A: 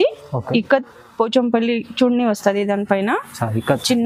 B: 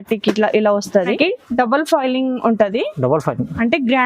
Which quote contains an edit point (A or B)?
B